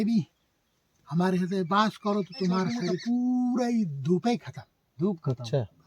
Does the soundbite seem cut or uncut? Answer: cut